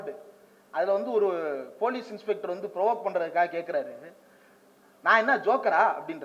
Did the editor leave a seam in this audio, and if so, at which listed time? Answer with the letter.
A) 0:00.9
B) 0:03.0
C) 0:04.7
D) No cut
D